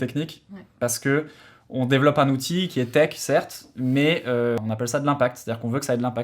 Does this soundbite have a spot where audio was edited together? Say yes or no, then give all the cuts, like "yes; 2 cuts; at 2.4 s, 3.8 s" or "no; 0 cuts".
yes; 1 cut; at 4.6 s